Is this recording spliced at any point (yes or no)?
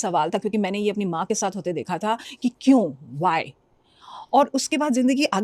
no